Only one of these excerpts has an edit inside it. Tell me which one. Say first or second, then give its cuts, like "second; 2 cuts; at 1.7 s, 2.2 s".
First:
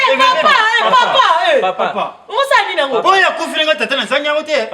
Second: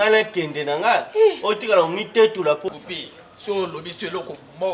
second; 1 cut; at 2.7 s